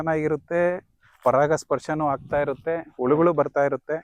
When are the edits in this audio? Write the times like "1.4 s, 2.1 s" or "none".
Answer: none